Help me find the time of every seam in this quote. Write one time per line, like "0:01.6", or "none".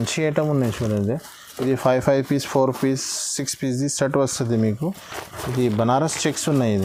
none